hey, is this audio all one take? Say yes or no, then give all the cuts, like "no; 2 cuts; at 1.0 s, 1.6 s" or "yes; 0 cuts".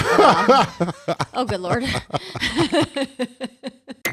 yes; 0 cuts